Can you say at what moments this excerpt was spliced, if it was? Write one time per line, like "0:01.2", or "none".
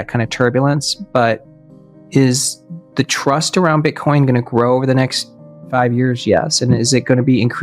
none